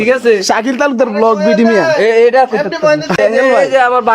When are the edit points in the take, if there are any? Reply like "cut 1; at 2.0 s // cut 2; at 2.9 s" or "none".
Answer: cut 1; at 3.2 s